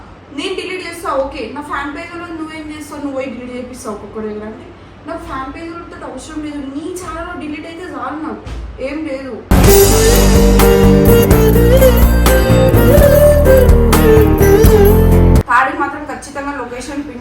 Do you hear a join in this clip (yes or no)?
yes